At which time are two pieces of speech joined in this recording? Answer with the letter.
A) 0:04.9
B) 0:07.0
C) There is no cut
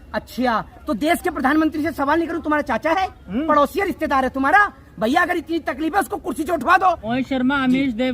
B